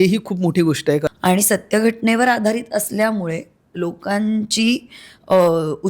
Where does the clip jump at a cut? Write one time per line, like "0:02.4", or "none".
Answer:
0:01.1